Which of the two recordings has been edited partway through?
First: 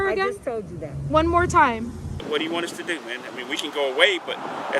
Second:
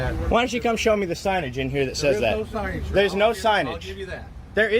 first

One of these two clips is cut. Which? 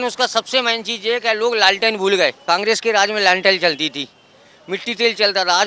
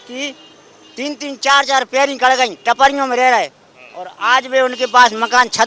first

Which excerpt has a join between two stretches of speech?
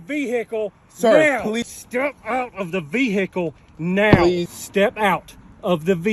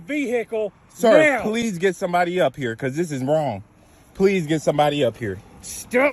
first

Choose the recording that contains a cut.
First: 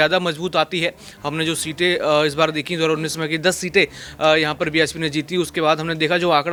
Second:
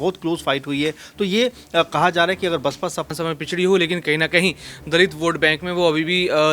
second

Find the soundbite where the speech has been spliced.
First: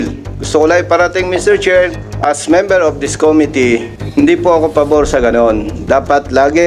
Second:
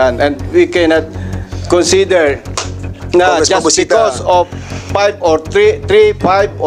first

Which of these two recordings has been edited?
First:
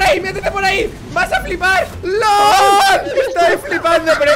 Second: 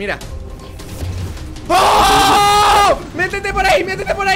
first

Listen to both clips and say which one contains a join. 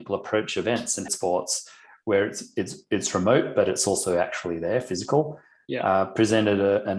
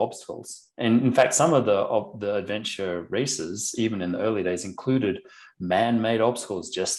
first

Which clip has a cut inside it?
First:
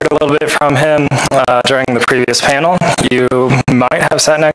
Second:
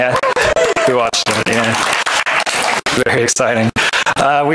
second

